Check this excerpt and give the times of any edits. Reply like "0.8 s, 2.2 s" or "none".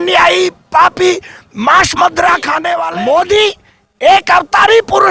2.8 s